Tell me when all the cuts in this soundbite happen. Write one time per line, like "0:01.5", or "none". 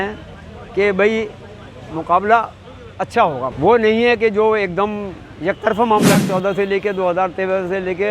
0:03.5
0:06.2